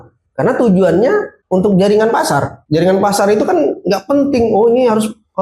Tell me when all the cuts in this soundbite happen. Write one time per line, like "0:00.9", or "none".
0:01.4
0:02.6